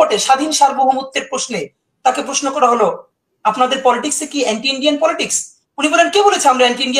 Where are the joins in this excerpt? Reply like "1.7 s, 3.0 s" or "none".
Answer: none